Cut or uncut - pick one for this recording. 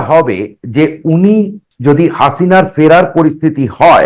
cut